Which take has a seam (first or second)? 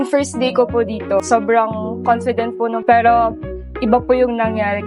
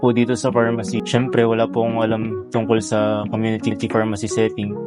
first